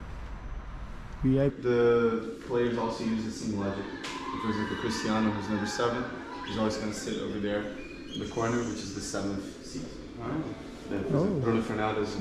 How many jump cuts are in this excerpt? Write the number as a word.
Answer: one